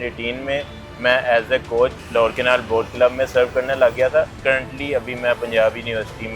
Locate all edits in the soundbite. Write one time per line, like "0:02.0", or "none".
0:02.0
0:04.3